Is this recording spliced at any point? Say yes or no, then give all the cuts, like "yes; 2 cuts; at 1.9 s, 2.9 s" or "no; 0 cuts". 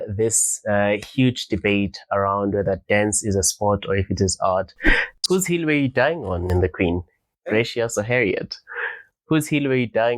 yes; 1 cut; at 5.2 s